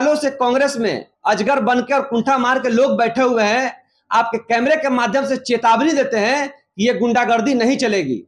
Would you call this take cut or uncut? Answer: uncut